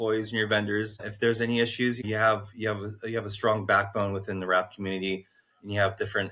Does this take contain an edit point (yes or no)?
yes